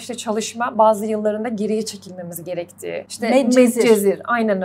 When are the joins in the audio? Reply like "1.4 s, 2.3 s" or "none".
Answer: 3.5 s